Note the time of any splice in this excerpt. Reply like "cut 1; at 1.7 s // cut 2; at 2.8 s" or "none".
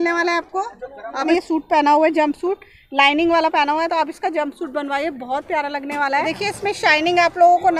cut 1; at 1.3 s // cut 2; at 6.2 s